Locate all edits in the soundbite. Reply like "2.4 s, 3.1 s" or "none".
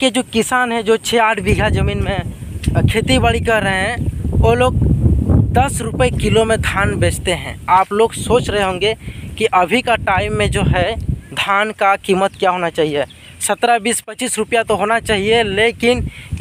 none